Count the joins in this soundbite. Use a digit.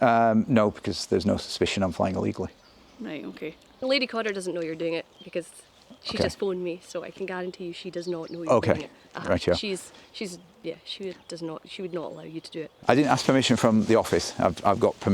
2